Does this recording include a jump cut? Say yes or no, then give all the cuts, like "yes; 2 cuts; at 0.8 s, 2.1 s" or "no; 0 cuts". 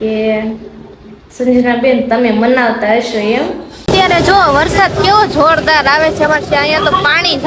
yes; 1 cut; at 3.7 s